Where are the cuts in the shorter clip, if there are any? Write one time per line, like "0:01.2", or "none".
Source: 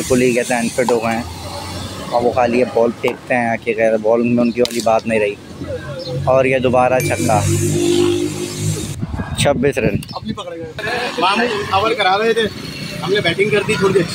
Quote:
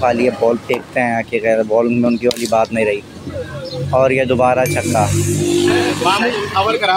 0:06.0